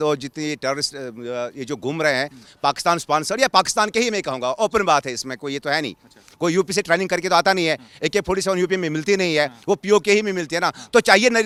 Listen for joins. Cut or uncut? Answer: uncut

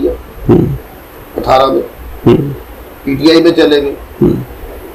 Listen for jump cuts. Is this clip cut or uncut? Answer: uncut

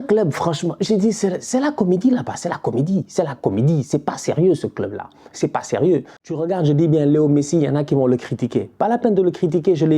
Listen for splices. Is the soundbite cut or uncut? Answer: cut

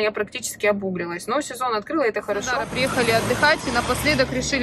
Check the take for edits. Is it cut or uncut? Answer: cut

